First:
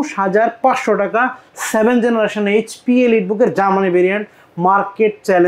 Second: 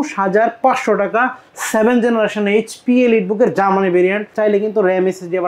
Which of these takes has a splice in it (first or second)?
second